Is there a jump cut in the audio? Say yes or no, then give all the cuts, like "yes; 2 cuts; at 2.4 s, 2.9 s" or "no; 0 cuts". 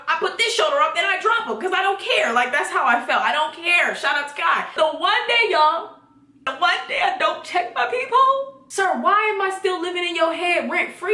yes; 3 cuts; at 4.7 s, 6.4 s, 8.6 s